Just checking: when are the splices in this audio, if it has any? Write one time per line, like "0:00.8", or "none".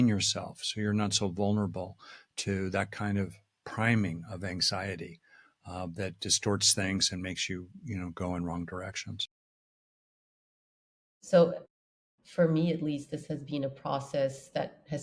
none